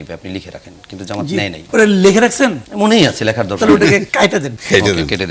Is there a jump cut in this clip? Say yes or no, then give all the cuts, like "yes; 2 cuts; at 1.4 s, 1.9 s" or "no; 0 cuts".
yes; 3 cuts; at 1.6 s, 2.6 s, 4.3 s